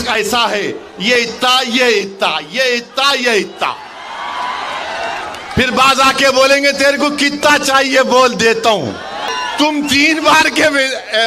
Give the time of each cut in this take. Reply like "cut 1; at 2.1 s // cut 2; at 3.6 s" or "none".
cut 1; at 9.3 s